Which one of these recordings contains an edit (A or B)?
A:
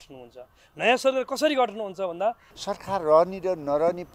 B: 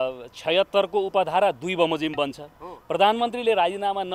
A